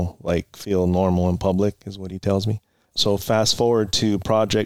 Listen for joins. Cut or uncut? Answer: cut